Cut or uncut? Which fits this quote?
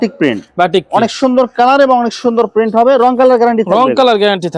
uncut